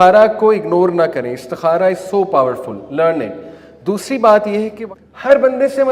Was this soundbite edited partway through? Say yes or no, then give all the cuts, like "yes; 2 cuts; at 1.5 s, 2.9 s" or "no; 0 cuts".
yes; 1 cut; at 4.8 s